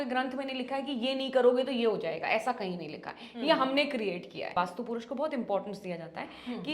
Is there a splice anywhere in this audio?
yes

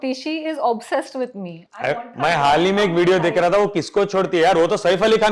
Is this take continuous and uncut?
yes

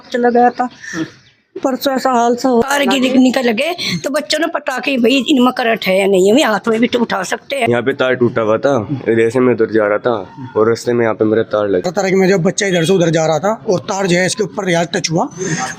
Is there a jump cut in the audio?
yes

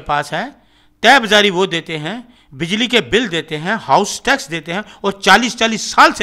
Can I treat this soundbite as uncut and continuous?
yes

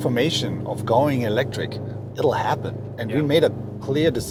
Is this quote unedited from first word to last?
yes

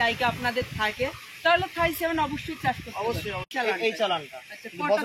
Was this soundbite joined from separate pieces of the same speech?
yes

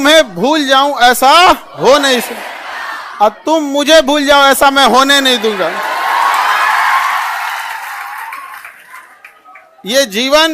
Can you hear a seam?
no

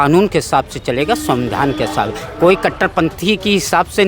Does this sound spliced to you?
no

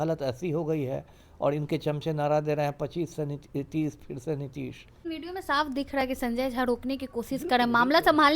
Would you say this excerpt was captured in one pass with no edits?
no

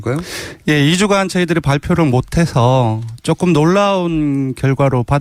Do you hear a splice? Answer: no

